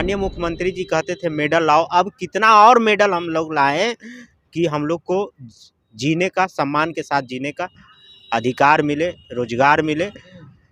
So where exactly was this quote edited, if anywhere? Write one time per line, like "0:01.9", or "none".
none